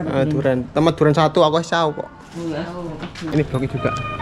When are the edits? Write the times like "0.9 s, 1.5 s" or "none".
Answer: 3.3 s